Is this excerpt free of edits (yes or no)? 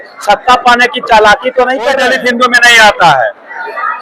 no